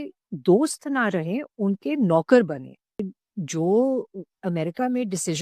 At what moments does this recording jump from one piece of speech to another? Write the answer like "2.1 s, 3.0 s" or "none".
3.2 s